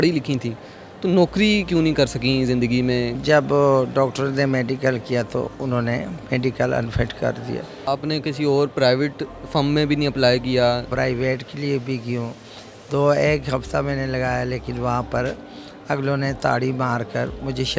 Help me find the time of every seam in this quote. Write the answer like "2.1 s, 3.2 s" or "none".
3.2 s, 7.8 s, 10.9 s